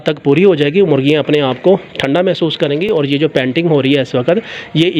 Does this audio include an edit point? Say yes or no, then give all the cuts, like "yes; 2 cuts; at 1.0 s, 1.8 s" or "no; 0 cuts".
no; 0 cuts